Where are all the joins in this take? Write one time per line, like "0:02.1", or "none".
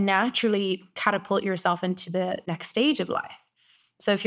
0:02.5